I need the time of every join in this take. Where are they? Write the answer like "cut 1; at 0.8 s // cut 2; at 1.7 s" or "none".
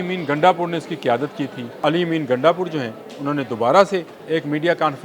cut 1; at 1.8 s // cut 2; at 4.2 s